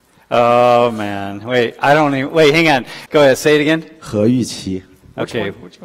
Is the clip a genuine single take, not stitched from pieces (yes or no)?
no